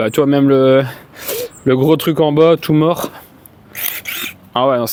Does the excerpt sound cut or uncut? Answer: uncut